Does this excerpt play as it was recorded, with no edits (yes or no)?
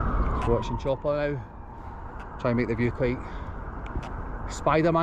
yes